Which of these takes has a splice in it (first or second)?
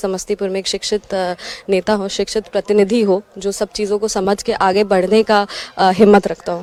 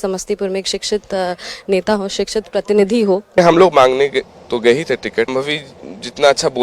second